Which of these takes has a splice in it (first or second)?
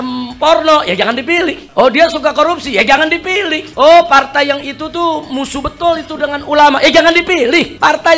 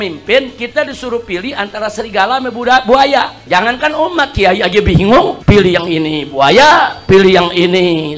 second